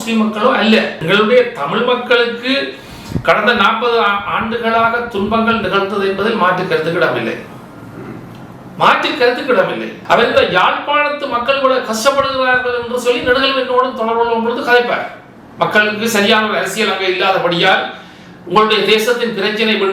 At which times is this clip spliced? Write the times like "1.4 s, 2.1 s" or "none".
1.0 s, 9.9 s